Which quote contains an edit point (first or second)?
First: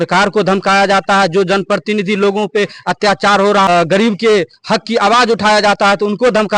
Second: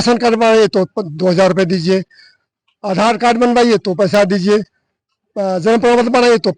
first